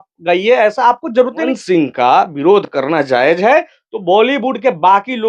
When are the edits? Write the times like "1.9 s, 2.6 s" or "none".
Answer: 1.5 s